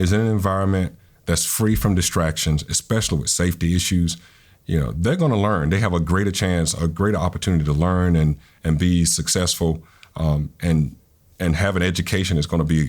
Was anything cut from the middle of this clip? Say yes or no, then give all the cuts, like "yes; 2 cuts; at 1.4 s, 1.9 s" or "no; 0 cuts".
no; 0 cuts